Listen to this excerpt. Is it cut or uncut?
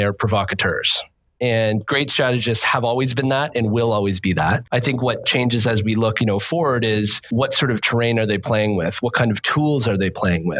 cut